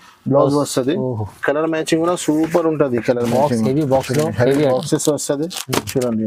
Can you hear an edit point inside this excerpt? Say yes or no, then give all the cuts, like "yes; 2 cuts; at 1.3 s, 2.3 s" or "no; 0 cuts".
no; 0 cuts